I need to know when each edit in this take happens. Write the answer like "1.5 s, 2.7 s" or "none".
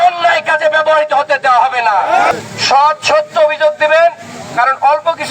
2.3 s